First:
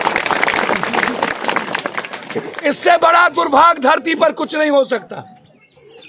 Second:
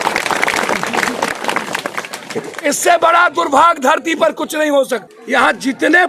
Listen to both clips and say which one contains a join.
second; 1 cut; at 5.1 s

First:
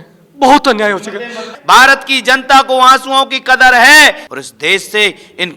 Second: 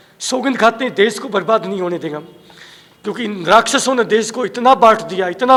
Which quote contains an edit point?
first; 2 cuts; at 1.5 s, 4.2 s

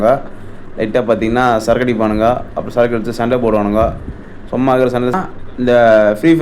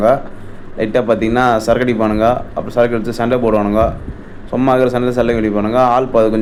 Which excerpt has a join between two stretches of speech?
first; 1 cut; at 5.4 s

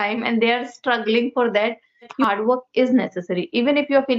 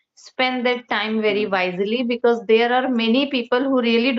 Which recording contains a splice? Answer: first; 1 cut; at 2.2 s

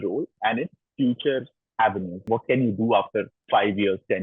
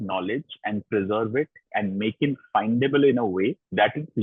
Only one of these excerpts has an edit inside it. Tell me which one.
first; 2 cuts; at 1.6 s, 3.4 s

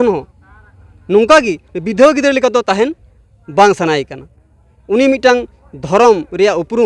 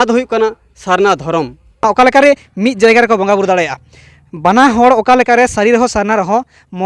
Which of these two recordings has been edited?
second; 1 cut; at 1.8 s

